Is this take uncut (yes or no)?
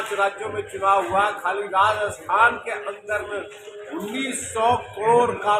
yes